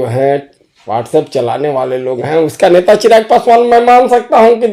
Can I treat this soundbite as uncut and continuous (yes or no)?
yes